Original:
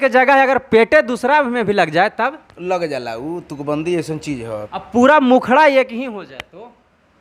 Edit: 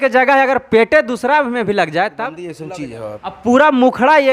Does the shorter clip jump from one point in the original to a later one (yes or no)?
yes